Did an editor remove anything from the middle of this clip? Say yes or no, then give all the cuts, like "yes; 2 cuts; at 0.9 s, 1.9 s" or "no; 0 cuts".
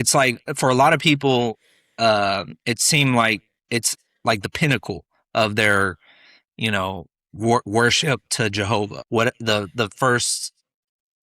yes; 1 cut; at 9.0 s